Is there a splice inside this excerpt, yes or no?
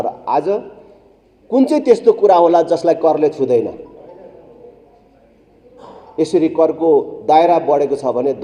no